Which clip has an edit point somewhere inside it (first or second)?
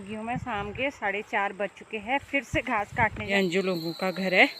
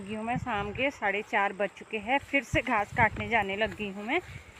first